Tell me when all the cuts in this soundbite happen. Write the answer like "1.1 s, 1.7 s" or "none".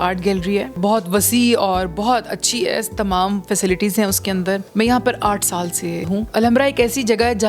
0.8 s, 4.7 s, 6.2 s